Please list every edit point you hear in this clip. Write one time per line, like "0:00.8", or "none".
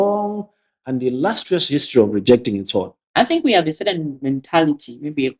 0:03.0